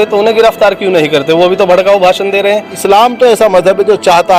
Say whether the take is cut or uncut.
cut